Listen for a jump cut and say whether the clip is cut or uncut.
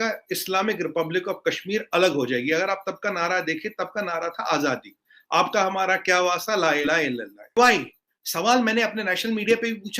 cut